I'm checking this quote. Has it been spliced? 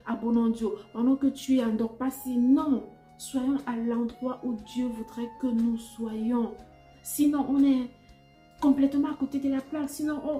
no; 0 cuts

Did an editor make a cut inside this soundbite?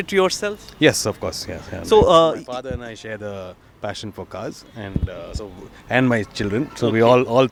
no; 0 cuts

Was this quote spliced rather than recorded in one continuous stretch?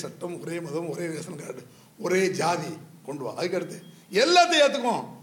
no; 0 cuts

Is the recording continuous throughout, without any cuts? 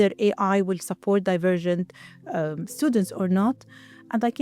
yes; 0 cuts

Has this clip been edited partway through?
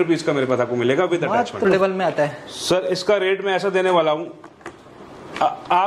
yes; 1 cut; at 1.7 s

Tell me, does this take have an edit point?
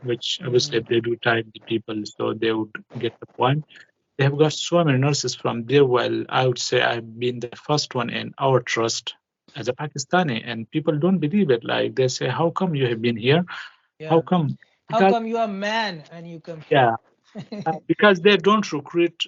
no; 0 cuts

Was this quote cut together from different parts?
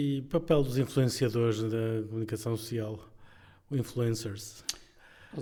no; 0 cuts

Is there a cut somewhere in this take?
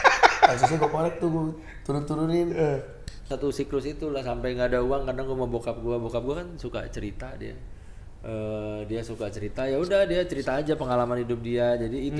yes; 1 cut; at 3.3 s

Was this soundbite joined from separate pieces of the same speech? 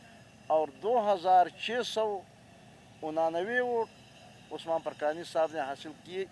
no; 0 cuts

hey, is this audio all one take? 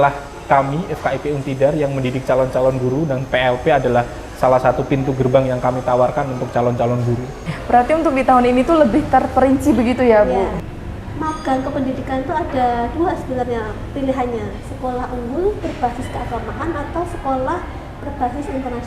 no; 2 cuts; at 7.5 s, 10.6 s

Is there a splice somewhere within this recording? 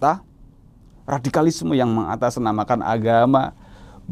no; 0 cuts

